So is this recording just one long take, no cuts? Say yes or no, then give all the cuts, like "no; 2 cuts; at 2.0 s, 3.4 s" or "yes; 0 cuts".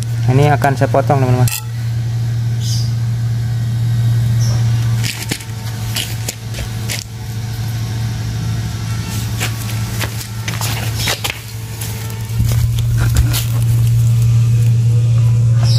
yes; 0 cuts